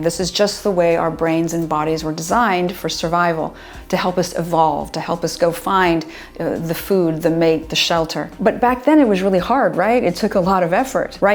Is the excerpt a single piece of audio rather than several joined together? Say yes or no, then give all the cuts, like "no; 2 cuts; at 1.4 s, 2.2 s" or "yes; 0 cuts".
yes; 0 cuts